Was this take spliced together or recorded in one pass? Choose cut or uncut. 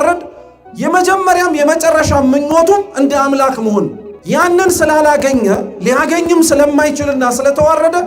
cut